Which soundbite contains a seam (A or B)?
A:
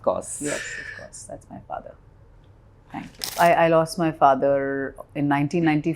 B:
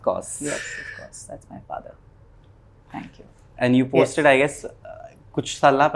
A